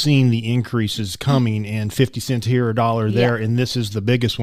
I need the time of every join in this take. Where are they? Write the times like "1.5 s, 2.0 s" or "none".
none